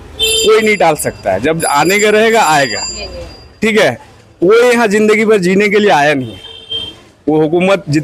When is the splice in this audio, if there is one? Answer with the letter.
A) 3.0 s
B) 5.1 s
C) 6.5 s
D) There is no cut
D